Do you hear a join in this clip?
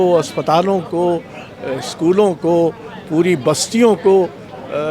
no; 0 cuts

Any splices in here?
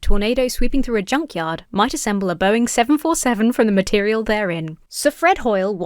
yes; 1 cut; at 4.8 s

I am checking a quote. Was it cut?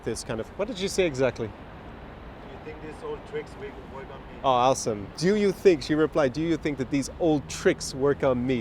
yes; 1 cut; at 5.0 s

